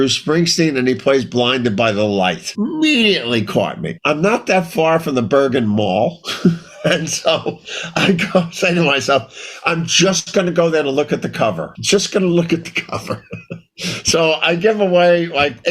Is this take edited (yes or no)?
yes